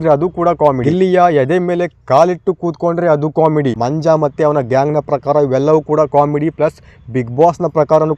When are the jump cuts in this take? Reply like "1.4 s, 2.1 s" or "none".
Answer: 0.8 s, 3.8 s